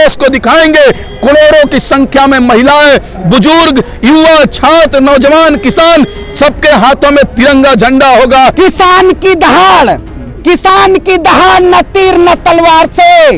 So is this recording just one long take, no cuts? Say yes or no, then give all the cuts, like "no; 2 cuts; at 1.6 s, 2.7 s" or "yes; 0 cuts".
no; 1 cut; at 8.5 s